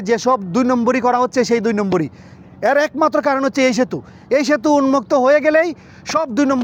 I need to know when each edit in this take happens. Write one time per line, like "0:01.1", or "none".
none